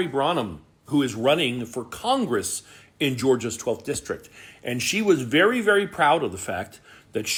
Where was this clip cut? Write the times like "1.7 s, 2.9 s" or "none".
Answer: none